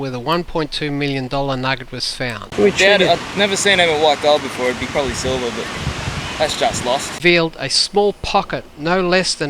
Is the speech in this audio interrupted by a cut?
yes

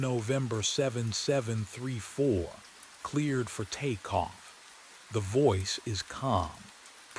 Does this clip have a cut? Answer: yes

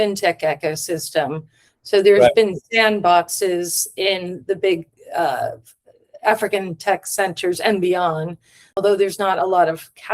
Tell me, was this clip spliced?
yes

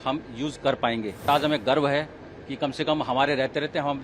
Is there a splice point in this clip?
yes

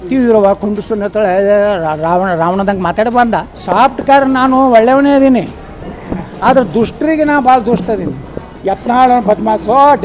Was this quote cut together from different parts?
yes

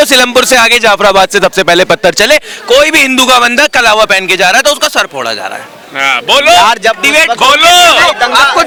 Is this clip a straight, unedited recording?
yes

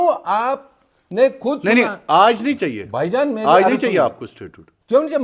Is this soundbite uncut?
yes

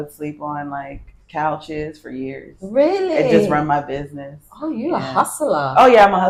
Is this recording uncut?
yes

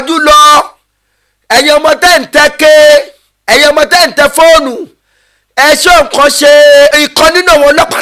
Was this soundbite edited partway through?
yes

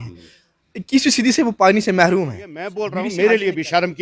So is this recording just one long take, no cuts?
no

